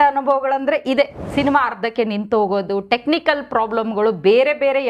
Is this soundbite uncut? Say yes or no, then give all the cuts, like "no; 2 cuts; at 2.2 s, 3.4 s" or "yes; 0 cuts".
no; 1 cut; at 1.2 s